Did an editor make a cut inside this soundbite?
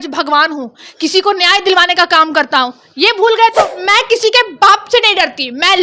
yes; 1 cut; at 3.8 s

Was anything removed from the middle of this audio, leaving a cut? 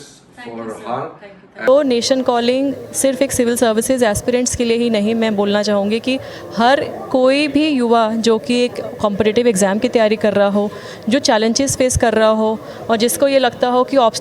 yes; 1 cut; at 1.7 s

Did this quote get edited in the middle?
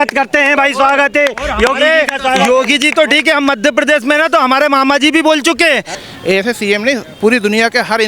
yes; 1 cut; at 5.9 s

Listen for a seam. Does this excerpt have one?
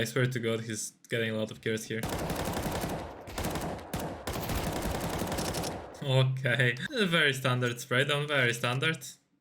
yes; 1 cut; at 6.8 s

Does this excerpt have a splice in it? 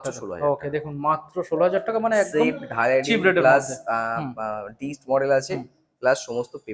no; 0 cuts

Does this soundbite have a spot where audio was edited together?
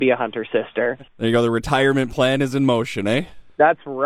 yes; 1 cut; at 1.1 s

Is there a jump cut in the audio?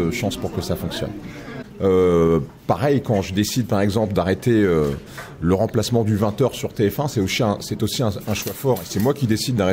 yes; 1 cut; at 1.5 s

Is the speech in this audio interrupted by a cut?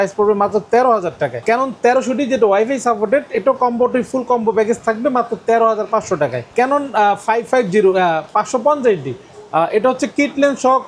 yes; 2 cuts; at 1.4 s, 6.5 s

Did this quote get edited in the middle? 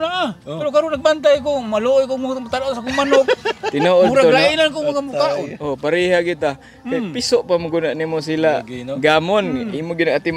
no; 0 cuts

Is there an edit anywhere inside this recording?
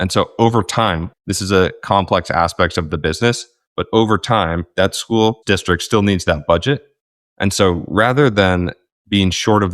yes; 1 cut; at 5.4 s

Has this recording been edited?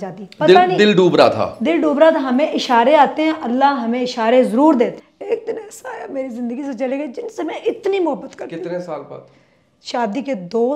yes; 1 cut; at 5.0 s

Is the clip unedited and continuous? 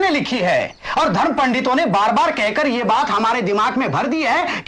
yes; 0 cuts

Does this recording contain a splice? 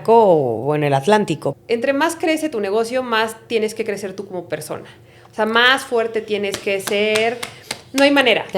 yes; 1 cut; at 1.5 s

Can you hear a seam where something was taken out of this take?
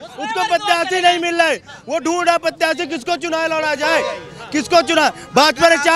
no; 0 cuts

